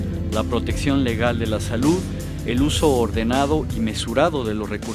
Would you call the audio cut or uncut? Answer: uncut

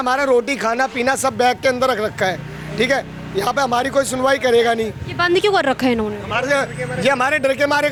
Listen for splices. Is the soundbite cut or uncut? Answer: uncut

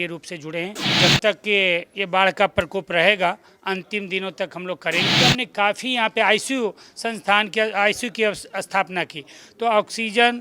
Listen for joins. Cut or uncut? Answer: cut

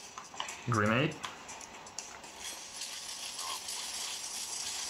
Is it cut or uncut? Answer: uncut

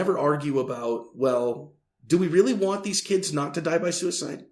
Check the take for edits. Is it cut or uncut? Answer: uncut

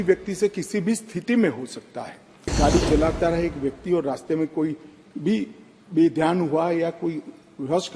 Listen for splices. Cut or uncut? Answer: cut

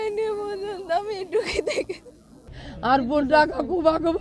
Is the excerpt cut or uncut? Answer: cut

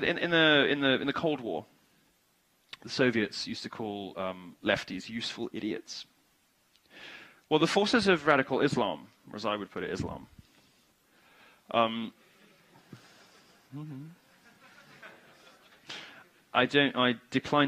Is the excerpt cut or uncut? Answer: cut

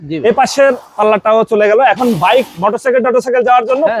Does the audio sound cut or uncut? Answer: uncut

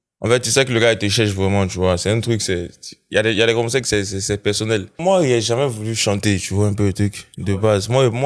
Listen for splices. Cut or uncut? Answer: cut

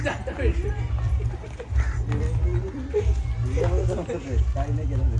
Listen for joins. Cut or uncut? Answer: uncut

